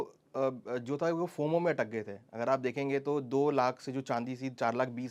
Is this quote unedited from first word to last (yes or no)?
yes